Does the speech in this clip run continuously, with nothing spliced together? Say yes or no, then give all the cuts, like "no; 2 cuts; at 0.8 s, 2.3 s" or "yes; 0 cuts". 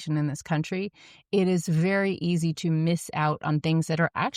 yes; 0 cuts